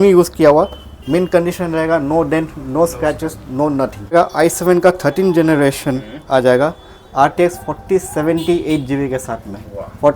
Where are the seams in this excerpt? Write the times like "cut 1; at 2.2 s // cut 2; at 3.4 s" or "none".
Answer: cut 1; at 4.1 s

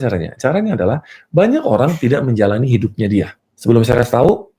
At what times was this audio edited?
cut 1; at 3.4 s

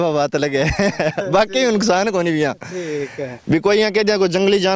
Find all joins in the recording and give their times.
none

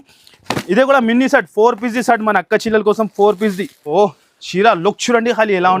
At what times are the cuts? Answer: cut 1; at 3.9 s

